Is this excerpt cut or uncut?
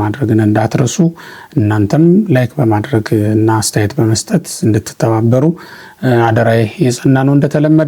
uncut